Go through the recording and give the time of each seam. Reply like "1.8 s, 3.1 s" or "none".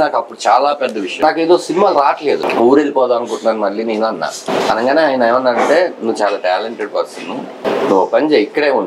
1.1 s, 2.5 s, 4.4 s, 7.5 s